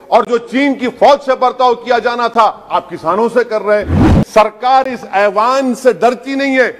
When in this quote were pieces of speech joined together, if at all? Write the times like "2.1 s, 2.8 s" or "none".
4.0 s